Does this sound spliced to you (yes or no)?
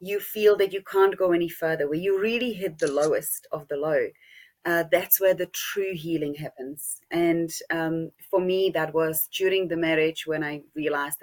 no